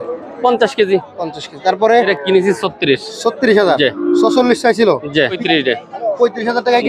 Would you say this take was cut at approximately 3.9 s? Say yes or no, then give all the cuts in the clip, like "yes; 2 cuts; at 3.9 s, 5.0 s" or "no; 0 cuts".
no; 2 cuts; at 2.1 s, 5.4 s